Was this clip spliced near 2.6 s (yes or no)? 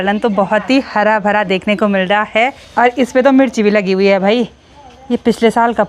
yes